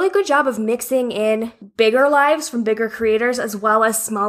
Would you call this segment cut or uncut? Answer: cut